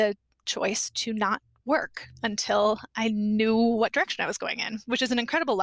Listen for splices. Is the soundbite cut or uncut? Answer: uncut